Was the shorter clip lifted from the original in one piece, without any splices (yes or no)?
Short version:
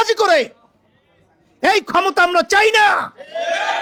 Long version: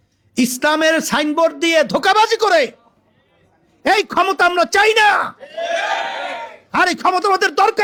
yes